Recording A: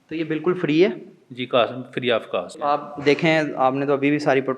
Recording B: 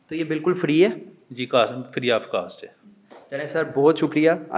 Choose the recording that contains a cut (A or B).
A